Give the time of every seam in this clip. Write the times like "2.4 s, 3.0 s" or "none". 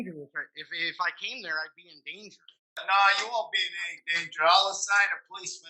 2.8 s